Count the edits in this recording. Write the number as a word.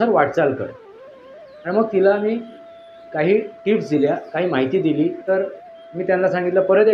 one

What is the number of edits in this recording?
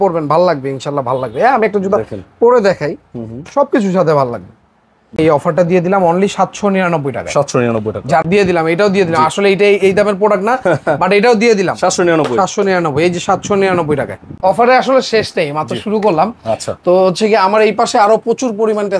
three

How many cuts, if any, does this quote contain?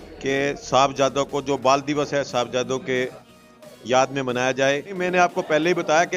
one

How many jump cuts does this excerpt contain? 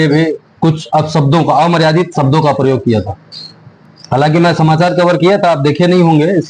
zero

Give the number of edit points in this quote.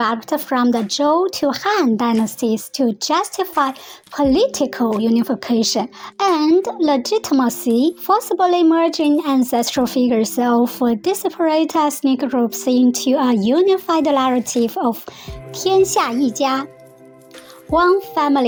zero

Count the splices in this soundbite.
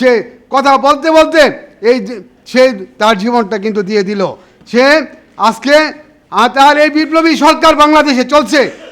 zero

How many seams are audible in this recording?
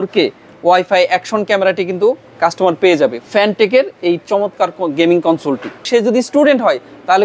two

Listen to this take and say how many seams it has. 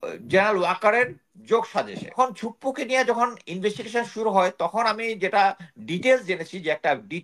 one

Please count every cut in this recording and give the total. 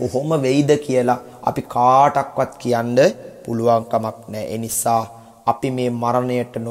one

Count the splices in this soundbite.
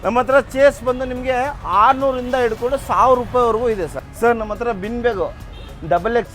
one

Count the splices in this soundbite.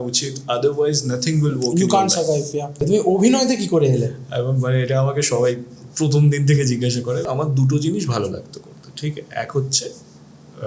two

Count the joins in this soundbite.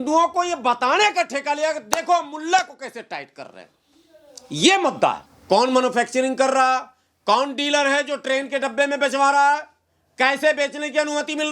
one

